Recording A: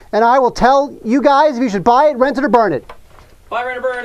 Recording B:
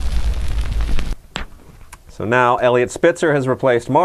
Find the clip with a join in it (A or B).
B